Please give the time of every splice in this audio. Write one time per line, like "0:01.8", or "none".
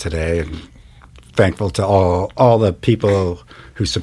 none